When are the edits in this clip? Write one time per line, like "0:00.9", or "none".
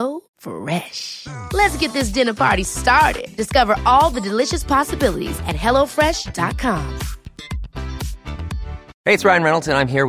0:08.9